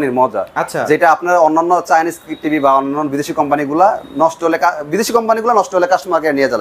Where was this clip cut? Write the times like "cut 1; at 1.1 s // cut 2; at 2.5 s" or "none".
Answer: none